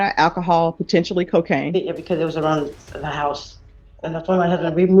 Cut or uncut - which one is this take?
uncut